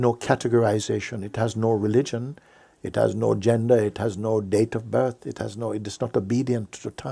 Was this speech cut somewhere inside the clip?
no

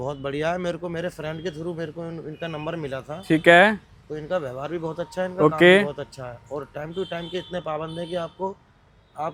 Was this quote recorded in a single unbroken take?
yes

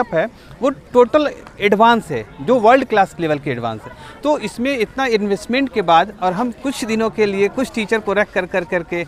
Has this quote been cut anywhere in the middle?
no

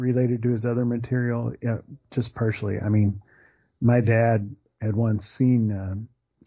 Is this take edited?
no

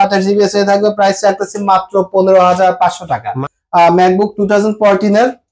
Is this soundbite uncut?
no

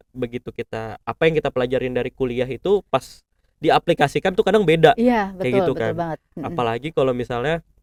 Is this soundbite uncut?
yes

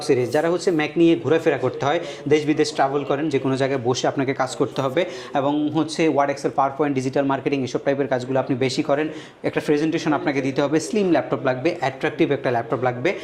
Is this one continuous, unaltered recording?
yes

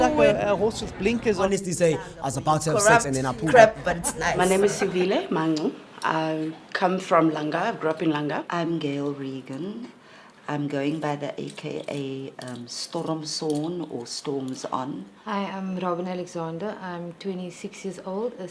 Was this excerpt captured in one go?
no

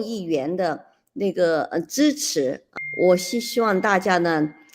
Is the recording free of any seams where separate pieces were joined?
no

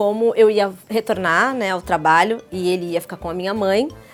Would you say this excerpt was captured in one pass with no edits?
yes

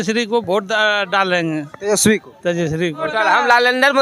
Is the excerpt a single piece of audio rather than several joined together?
no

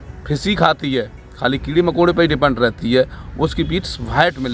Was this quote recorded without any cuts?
yes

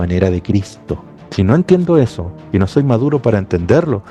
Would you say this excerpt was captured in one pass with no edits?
yes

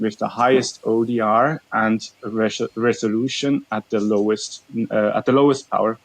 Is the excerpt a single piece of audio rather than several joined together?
yes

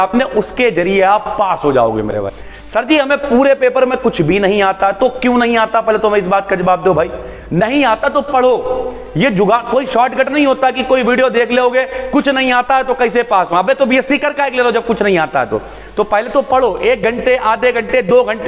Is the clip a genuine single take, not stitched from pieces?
no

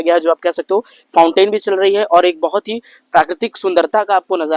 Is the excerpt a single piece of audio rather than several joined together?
yes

